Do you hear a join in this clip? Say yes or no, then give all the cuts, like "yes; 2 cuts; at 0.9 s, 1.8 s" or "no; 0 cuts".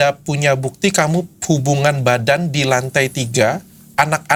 no; 0 cuts